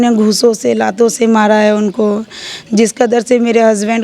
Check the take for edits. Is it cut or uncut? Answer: uncut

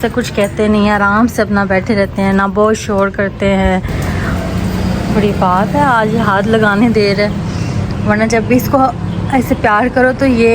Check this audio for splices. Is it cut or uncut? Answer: cut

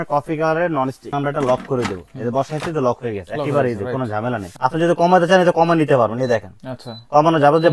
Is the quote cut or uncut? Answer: cut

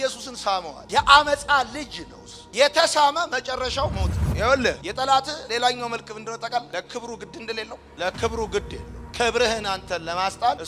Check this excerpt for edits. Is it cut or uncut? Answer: uncut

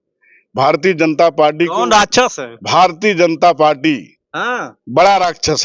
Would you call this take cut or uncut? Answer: uncut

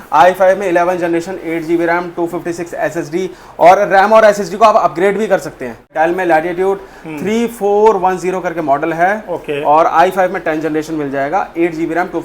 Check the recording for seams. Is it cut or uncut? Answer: cut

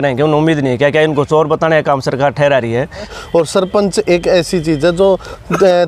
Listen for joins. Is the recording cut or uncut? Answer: cut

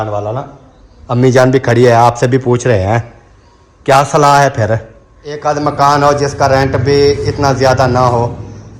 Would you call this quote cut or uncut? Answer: cut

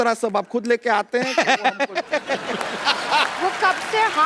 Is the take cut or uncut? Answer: cut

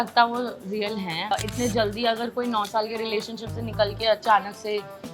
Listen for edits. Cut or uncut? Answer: cut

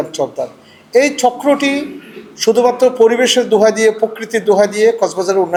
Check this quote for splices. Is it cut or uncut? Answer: uncut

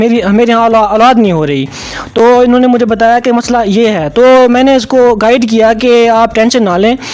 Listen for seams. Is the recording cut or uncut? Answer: uncut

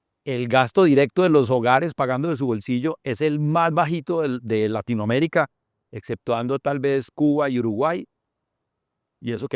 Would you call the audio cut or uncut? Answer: uncut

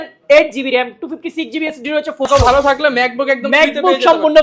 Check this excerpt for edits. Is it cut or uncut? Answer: cut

